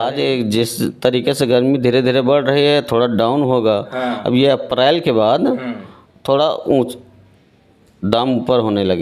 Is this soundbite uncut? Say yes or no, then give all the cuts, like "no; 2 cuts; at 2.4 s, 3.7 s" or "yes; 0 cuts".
yes; 0 cuts